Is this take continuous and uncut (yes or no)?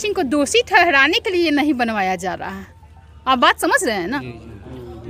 yes